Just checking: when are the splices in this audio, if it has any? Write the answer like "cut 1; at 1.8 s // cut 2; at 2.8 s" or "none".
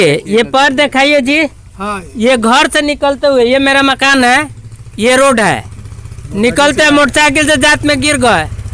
none